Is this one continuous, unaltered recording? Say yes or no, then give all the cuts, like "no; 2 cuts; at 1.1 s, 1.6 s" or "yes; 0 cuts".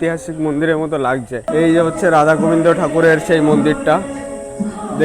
no; 1 cut; at 1.4 s